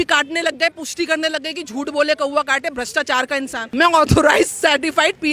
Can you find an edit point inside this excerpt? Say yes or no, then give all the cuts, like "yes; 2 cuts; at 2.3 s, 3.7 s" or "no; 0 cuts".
yes; 1 cut; at 3.6 s